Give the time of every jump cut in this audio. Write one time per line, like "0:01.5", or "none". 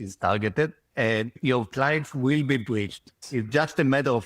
0:01.4
0:03.2